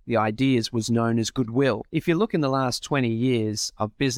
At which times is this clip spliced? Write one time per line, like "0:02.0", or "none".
0:01.8